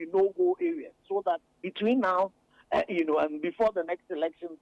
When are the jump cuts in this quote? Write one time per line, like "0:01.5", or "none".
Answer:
none